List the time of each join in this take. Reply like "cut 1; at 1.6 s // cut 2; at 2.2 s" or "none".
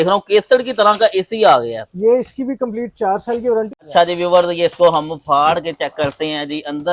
cut 1; at 3.8 s